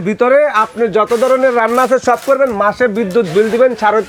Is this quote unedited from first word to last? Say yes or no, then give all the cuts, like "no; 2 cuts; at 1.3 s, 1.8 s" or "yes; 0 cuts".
yes; 0 cuts